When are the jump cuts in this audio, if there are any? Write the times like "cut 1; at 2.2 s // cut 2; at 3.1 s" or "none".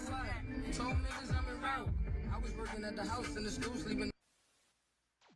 none